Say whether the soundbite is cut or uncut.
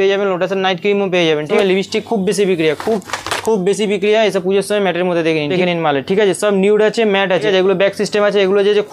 cut